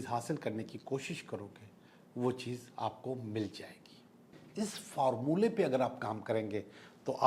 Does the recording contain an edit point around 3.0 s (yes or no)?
no